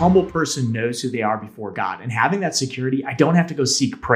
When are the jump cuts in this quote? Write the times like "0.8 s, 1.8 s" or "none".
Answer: none